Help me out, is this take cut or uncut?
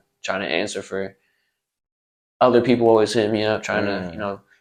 uncut